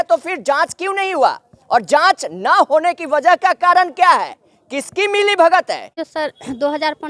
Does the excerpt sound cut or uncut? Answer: cut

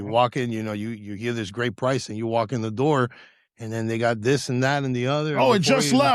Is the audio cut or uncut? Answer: uncut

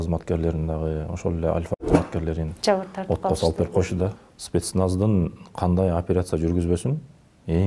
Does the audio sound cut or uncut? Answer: cut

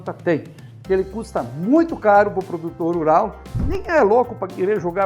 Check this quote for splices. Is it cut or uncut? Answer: cut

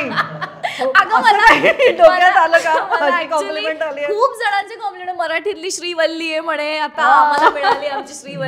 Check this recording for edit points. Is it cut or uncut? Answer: uncut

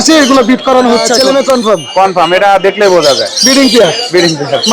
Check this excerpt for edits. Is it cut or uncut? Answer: cut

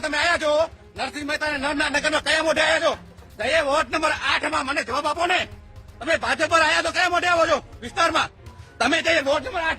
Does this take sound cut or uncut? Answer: uncut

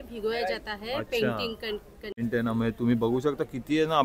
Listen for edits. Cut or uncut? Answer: cut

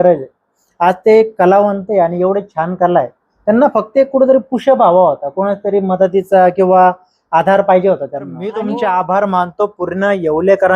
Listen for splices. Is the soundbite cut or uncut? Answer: cut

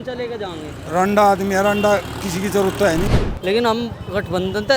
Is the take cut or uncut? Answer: cut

